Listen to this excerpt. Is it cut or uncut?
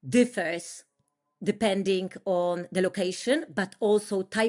uncut